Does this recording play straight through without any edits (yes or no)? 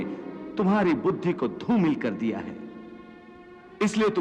yes